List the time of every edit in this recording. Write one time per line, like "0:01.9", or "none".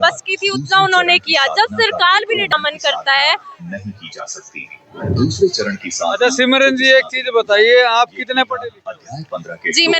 0:02.5